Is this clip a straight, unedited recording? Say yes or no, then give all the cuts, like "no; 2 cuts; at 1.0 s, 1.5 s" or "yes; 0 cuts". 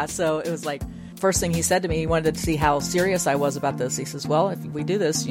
no; 1 cut; at 1.1 s